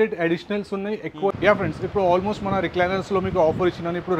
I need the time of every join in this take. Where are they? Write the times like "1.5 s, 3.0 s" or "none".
1.3 s